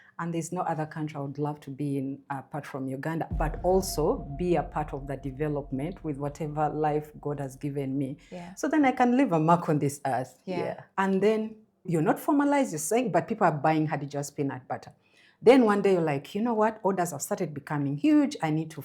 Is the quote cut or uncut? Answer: cut